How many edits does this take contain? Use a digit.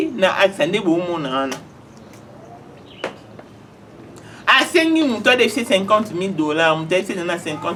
0